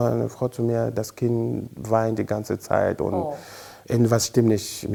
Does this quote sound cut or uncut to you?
uncut